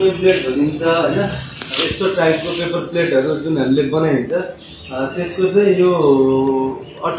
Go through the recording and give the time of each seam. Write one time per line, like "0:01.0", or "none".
none